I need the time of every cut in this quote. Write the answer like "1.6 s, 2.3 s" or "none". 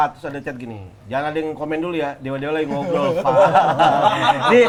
none